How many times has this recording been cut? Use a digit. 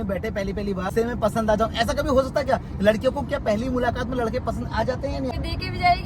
2